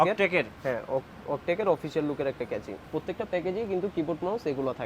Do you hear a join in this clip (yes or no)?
yes